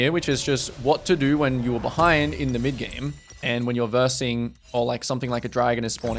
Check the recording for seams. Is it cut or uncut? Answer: uncut